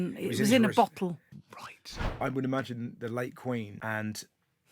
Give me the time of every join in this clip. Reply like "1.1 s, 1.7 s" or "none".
1.8 s, 3.7 s